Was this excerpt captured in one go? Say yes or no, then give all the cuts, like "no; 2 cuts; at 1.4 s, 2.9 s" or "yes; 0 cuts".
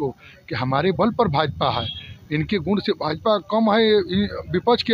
yes; 0 cuts